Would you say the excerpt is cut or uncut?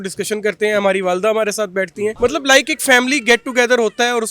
cut